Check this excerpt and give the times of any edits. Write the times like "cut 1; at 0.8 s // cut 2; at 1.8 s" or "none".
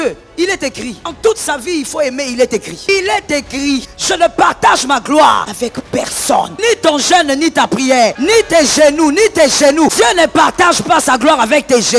cut 1; at 1.1 s // cut 2; at 2.9 s // cut 3; at 3.9 s // cut 4; at 5.5 s // cut 5; at 6.5 s // cut 6; at 8.2 s // cut 7; at 9.9 s